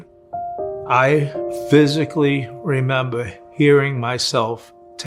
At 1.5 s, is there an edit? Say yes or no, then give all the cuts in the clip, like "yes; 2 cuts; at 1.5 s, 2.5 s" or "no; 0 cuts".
yes; 1 cut; at 1.5 s